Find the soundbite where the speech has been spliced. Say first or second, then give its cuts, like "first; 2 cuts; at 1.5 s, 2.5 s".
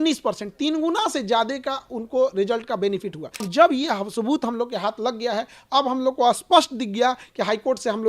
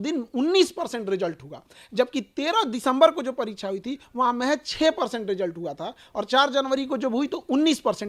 first; 1 cut; at 3.5 s